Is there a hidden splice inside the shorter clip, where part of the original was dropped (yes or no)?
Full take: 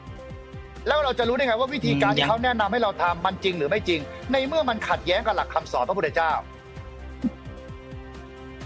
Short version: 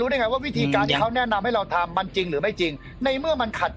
no